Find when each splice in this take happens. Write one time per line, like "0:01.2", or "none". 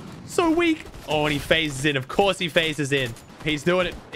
0:03.3